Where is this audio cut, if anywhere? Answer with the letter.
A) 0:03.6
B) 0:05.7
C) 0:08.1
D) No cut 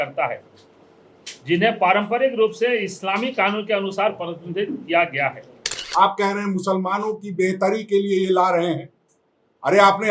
B